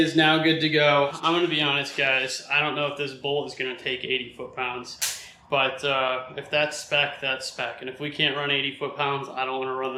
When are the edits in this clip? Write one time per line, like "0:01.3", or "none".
0:01.1